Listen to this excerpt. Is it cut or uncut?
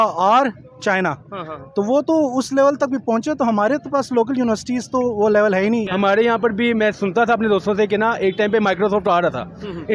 cut